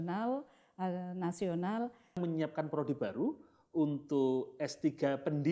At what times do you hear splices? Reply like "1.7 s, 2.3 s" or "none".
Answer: 2.2 s